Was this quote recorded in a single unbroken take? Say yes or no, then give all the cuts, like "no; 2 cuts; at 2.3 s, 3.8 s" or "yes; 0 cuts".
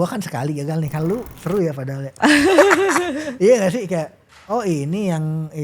no; 1 cut; at 1.3 s